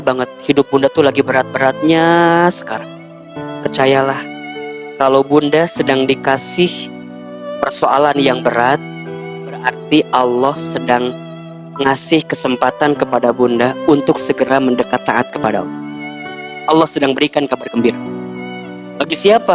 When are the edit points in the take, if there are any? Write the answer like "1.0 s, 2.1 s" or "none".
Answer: none